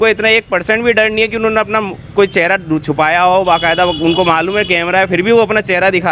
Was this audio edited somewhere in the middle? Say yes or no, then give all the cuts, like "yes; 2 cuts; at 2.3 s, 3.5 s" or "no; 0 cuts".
no; 0 cuts